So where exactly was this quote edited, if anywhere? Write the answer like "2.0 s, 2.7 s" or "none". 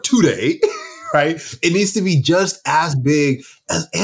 none